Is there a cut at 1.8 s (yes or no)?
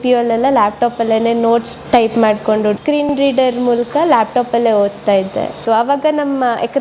yes